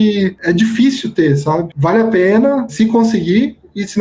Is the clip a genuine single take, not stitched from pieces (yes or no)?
no